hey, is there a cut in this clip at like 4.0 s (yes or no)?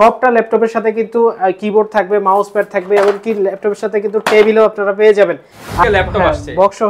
no